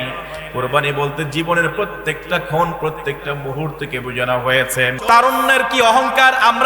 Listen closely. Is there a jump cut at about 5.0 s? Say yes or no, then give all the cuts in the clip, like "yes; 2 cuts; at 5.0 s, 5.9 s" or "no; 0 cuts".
yes; 1 cut; at 5.0 s